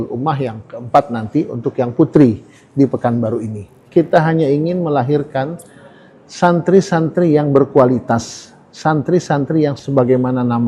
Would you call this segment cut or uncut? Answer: cut